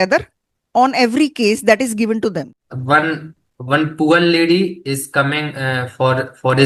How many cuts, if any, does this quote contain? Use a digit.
1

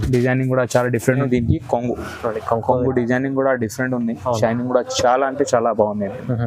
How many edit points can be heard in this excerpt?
1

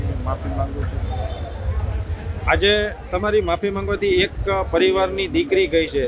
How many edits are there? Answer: 0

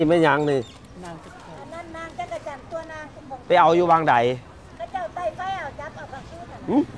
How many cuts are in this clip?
0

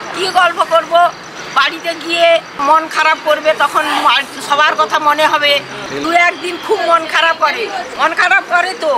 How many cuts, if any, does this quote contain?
3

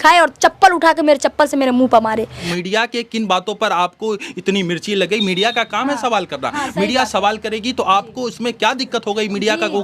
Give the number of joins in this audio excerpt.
1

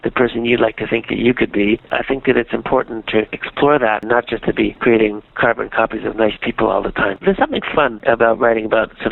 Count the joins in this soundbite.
3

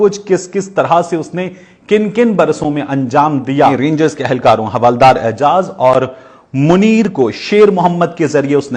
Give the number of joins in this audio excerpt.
1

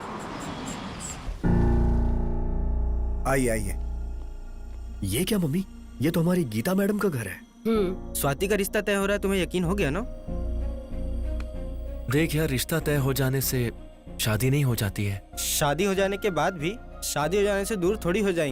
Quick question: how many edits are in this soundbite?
1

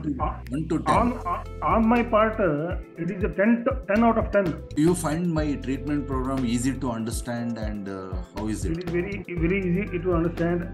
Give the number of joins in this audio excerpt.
1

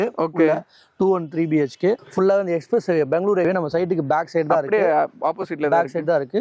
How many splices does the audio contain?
2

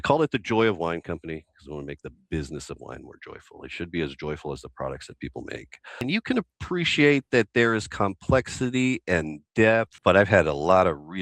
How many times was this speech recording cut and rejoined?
2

